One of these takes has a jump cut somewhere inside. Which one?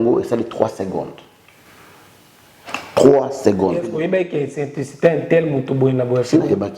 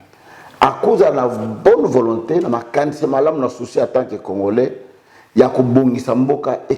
first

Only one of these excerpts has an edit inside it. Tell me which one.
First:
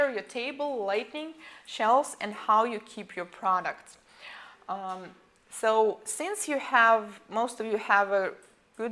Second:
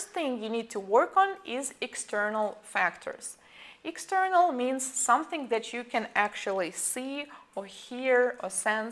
first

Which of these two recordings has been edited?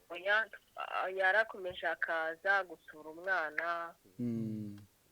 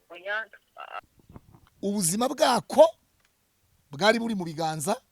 second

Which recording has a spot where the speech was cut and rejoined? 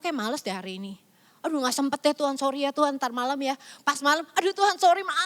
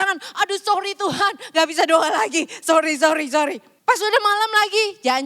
second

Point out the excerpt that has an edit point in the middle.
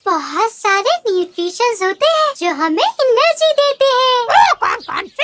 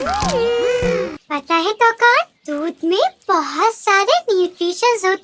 second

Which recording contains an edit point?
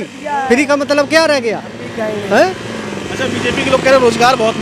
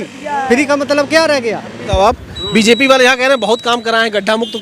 second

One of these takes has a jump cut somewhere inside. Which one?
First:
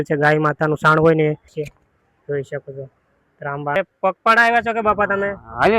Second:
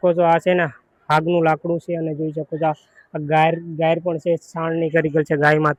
first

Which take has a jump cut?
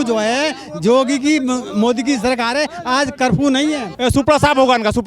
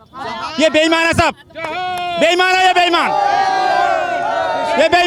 first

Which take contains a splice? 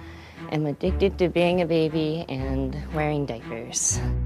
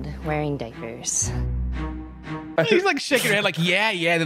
second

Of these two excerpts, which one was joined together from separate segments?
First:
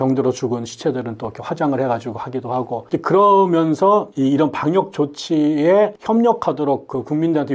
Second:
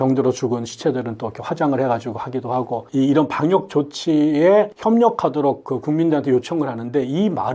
second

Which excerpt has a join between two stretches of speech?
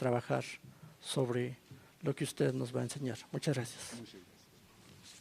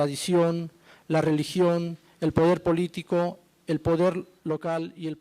second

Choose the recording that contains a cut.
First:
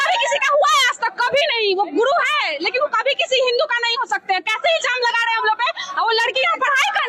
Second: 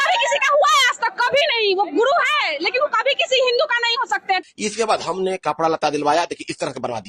second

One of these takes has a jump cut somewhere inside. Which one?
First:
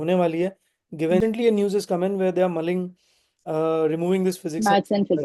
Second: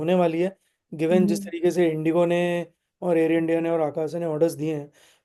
first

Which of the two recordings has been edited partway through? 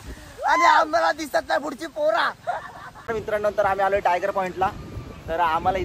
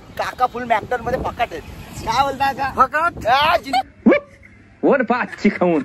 first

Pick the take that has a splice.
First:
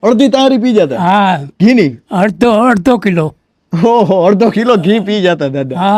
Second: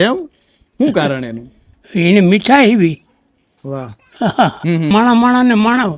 second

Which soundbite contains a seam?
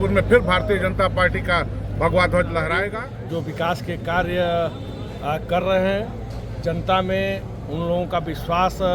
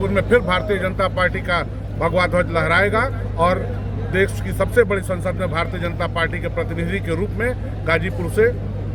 first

